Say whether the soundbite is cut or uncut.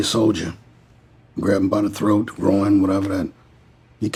uncut